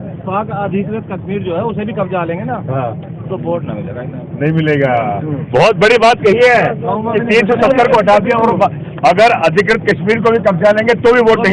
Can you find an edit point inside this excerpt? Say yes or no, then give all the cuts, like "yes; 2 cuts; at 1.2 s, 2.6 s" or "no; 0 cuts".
no; 0 cuts